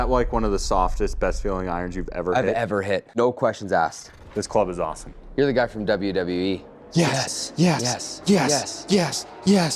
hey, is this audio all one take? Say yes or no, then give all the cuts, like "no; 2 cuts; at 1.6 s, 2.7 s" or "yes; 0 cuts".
no; 3 cuts; at 3.1 s, 4.0 s, 6.7 s